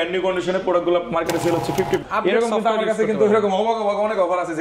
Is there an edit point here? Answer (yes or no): yes